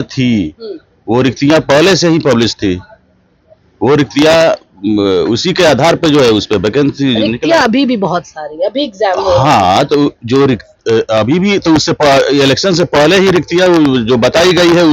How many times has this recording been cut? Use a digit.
0